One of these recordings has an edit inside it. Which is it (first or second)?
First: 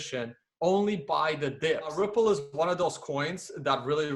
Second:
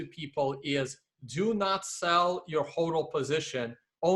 first